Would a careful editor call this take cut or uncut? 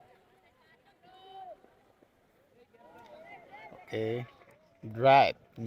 uncut